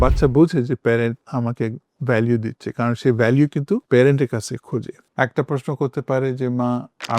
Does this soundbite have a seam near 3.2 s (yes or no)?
no